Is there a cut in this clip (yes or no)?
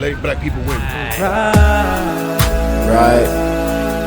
yes